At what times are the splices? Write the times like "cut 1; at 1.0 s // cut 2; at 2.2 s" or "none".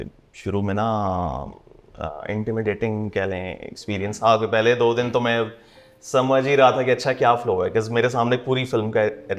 none